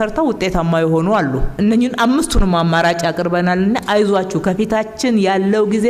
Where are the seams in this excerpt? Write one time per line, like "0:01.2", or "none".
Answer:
none